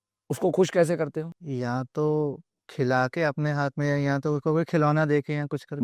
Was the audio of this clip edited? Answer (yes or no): yes